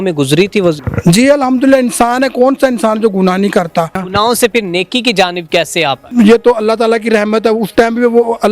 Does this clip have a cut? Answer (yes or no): yes